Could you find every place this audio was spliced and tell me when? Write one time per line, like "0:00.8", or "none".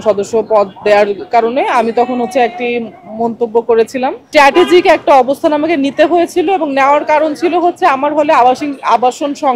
0:04.2